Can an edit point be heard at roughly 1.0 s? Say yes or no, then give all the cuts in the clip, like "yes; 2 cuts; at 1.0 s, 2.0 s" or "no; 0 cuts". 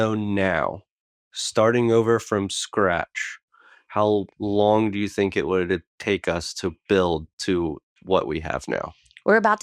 no; 0 cuts